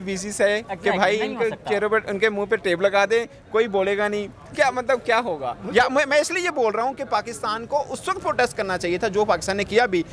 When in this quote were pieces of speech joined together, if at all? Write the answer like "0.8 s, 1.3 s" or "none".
none